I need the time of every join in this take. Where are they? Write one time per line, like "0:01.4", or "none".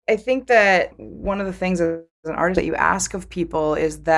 0:01.0

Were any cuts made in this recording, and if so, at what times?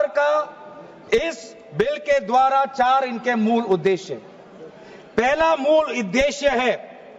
none

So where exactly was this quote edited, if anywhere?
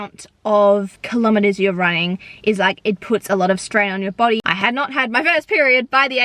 0:01.0
0:04.4

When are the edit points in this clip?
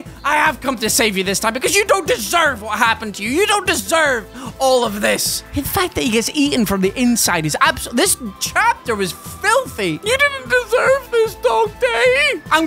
none

